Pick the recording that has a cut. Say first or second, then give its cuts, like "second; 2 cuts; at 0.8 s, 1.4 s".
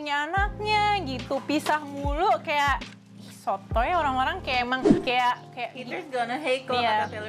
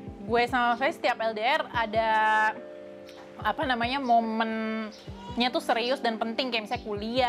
first; 1 cut; at 5.0 s